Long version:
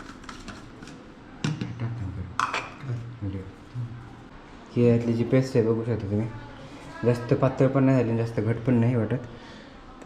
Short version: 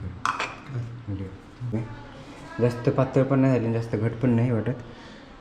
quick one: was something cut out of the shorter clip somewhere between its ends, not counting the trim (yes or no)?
yes